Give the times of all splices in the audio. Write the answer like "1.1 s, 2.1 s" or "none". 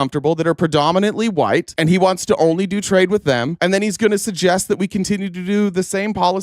1.7 s, 3.5 s

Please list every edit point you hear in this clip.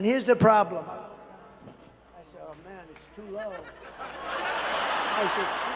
none

